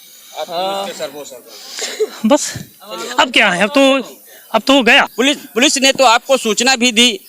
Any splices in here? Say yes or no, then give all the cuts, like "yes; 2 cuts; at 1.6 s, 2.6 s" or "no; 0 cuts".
yes; 1 cut; at 5.4 s